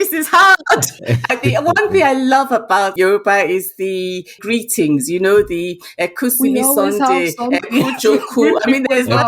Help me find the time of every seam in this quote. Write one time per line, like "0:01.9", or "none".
0:00.9
0:02.9
0:04.4